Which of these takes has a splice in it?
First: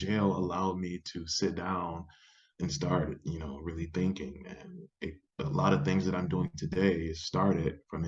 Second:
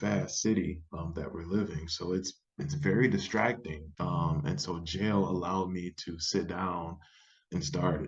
second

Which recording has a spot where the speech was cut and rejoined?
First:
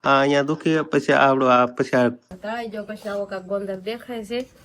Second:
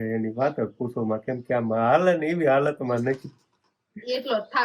first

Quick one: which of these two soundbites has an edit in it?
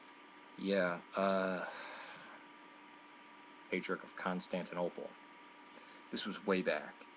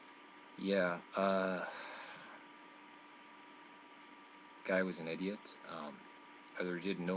second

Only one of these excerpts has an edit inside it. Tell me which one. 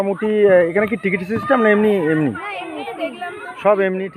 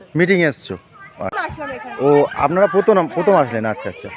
second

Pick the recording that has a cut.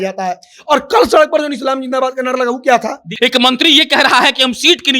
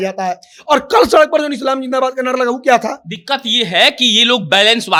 first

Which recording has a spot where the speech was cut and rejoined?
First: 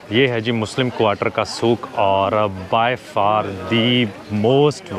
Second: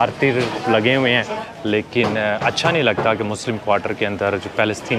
second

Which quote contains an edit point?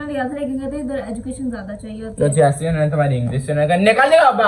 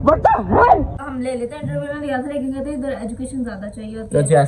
second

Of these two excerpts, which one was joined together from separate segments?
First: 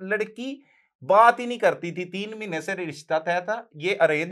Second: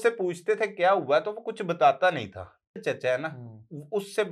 second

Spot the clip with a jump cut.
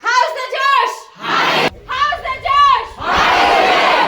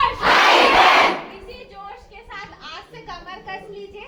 first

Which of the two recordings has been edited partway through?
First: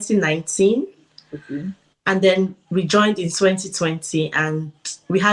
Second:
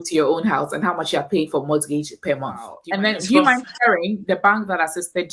second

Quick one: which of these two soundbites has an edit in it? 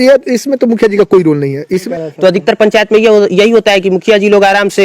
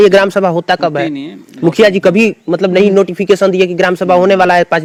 first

